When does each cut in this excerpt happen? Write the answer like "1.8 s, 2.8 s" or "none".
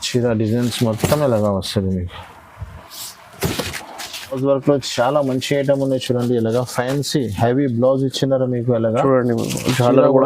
4.4 s